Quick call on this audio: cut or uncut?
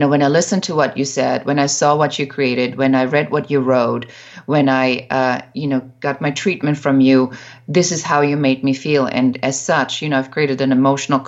uncut